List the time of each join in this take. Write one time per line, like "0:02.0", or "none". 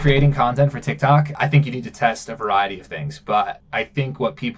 0:01.4
0:03.6

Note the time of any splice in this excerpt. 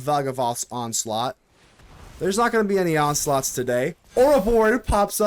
none

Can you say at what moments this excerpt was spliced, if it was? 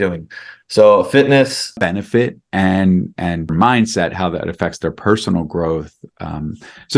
0:01.8
0:03.5

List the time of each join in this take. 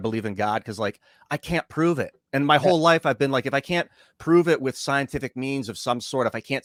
none

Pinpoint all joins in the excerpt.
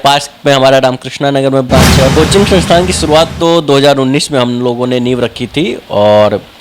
0:02.1

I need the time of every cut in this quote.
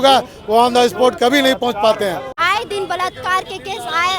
0:02.3

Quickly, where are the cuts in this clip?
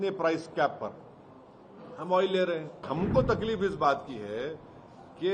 0:02.9

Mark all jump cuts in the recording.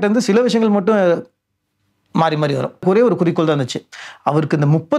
0:02.8

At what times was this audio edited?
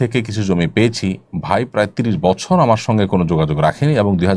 none

